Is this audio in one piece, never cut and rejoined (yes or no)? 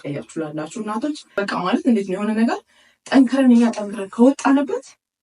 no